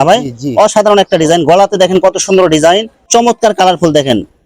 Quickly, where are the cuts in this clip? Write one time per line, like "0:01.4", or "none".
0:03.0